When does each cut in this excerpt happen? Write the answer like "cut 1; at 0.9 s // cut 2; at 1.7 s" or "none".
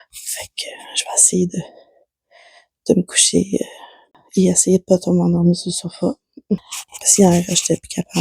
cut 1; at 4.1 s // cut 2; at 6.7 s